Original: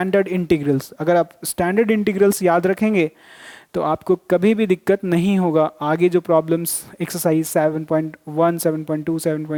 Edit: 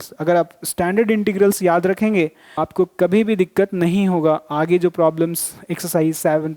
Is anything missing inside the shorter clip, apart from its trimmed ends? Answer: yes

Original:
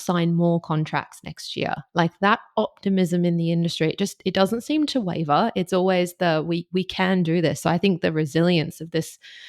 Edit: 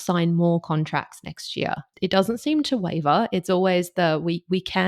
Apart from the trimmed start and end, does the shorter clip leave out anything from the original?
yes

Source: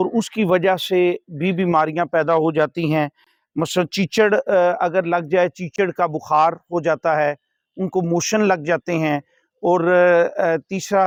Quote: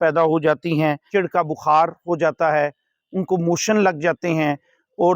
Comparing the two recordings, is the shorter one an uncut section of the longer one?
no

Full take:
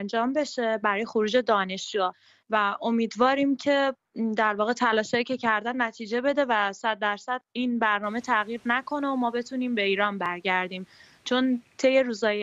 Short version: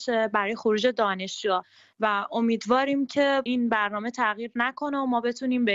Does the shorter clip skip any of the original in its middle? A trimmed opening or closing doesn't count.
yes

